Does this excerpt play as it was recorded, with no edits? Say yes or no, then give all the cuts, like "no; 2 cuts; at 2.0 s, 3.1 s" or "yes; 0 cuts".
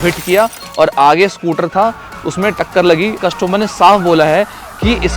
no; 1 cut; at 3.2 s